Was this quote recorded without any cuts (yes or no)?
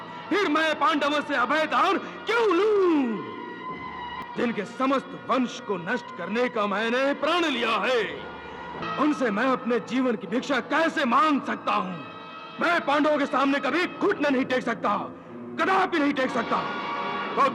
no